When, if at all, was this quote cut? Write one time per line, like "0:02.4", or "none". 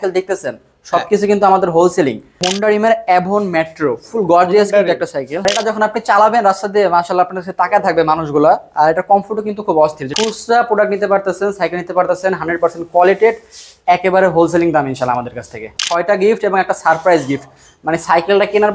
0:02.5
0:05.4
0:10.1
0:15.6

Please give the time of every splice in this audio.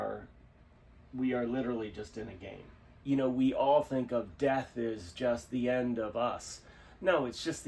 0:02.9

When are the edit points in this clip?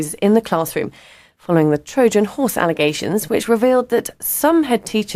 none

